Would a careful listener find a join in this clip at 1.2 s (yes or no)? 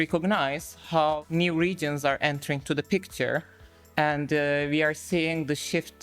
yes